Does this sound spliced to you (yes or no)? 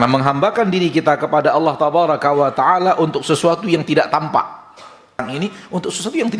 yes